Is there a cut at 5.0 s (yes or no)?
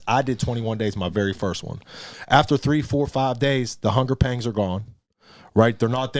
no